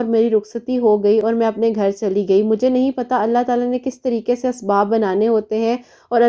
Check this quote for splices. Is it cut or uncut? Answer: uncut